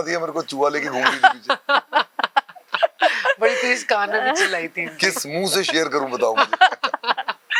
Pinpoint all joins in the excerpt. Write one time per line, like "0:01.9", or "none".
none